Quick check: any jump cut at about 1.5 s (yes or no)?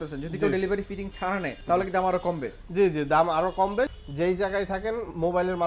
yes